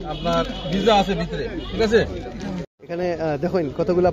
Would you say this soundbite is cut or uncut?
cut